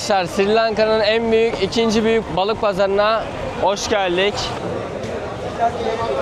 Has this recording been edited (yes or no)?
yes